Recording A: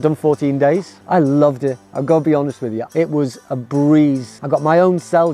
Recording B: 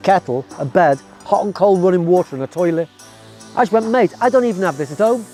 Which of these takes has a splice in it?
A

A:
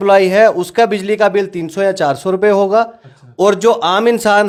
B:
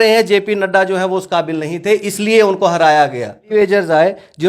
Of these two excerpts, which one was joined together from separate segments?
B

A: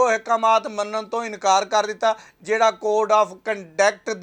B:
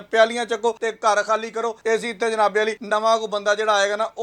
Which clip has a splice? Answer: B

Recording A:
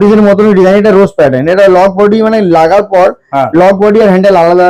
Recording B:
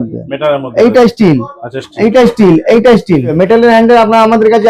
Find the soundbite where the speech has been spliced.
B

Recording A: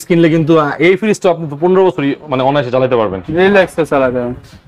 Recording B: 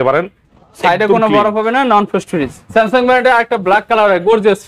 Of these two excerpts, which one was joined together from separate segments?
B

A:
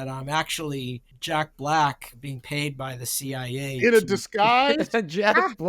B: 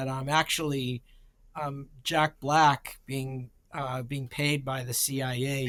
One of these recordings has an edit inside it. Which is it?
A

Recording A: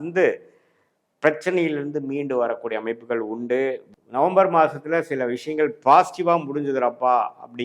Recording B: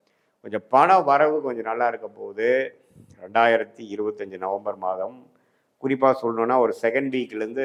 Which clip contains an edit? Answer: A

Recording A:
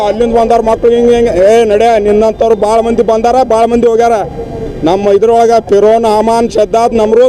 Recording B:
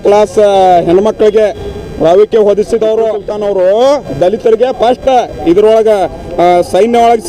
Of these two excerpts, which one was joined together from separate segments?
B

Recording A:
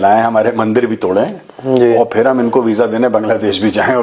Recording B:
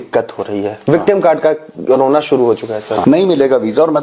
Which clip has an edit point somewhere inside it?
B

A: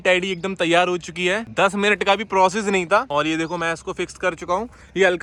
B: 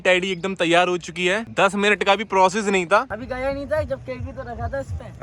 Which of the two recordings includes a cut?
B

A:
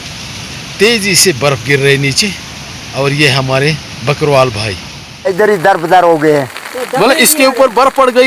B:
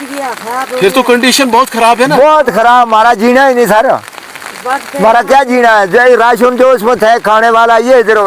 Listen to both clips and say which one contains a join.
A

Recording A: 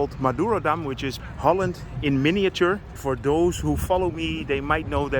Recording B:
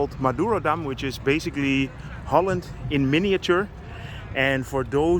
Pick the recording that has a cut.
A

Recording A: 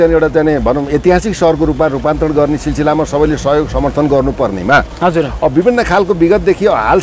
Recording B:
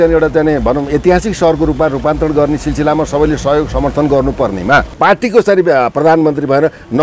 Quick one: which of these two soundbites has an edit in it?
B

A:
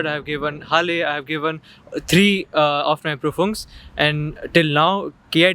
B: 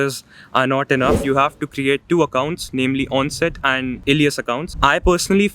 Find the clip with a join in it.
B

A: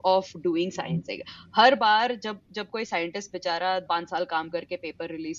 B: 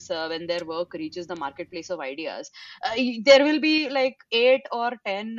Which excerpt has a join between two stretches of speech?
A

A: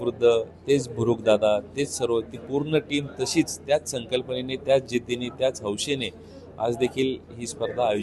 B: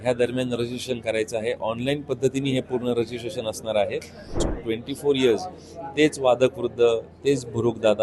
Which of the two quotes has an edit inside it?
B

